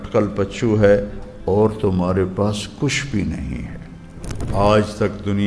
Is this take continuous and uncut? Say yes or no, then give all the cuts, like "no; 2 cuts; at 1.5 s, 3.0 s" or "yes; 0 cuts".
no; 1 cut; at 4.5 s